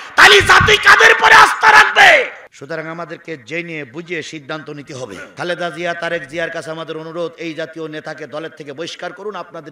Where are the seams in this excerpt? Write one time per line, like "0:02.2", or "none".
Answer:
0:02.5
0:05.3